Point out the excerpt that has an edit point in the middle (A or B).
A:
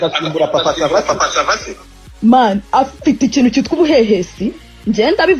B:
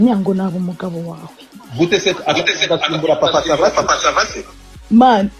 B